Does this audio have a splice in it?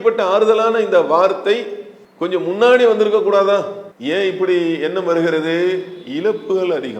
no; 0 cuts

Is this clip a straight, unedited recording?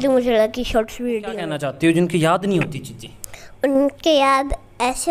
no; 1 cut; at 1.4 s

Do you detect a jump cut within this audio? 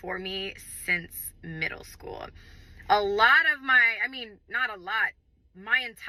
no; 0 cuts

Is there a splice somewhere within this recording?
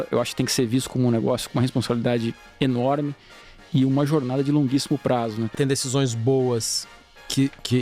yes; 1 cut; at 5.5 s

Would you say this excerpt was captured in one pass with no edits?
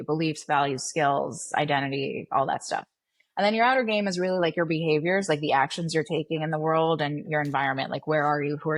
yes; 0 cuts

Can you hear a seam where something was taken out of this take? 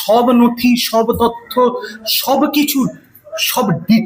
no; 0 cuts

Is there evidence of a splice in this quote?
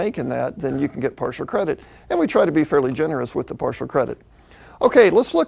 no; 0 cuts

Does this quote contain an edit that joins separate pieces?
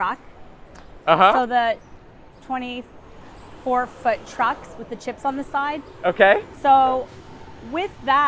no; 0 cuts

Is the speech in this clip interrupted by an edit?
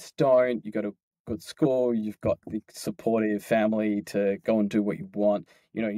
no; 0 cuts

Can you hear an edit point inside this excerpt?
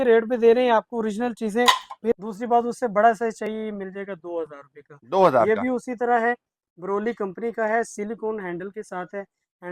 yes; 1 cut; at 2.1 s

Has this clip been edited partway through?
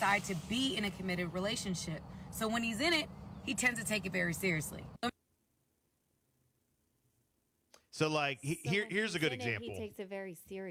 no; 0 cuts

